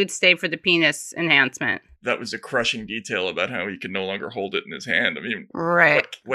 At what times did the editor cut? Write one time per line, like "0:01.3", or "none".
0:01.9